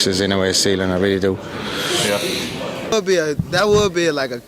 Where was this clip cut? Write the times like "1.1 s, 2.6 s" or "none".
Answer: 2.9 s